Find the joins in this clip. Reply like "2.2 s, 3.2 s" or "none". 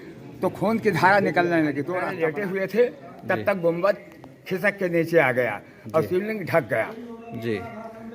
2.0 s